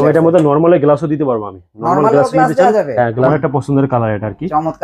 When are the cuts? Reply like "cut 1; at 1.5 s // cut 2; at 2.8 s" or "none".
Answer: cut 1; at 3.3 s